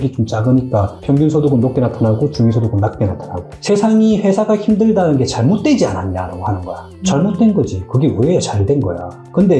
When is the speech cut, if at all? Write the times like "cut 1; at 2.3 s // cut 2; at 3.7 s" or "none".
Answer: cut 1; at 3.7 s